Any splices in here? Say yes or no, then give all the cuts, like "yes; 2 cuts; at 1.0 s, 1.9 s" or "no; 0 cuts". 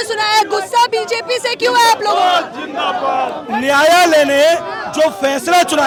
no; 0 cuts